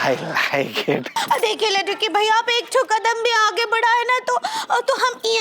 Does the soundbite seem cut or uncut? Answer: cut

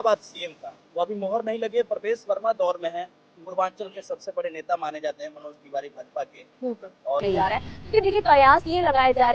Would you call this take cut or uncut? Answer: cut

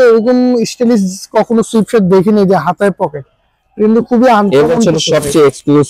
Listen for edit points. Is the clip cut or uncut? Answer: uncut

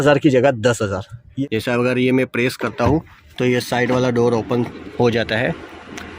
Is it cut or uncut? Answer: cut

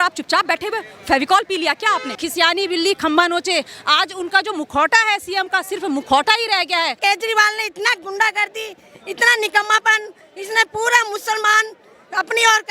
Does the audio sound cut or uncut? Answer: cut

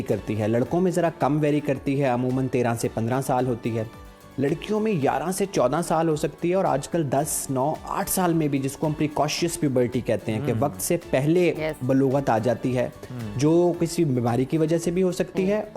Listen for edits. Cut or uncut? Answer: uncut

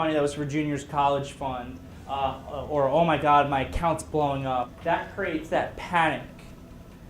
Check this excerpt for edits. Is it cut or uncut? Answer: cut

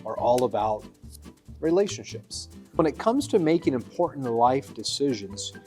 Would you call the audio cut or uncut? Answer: cut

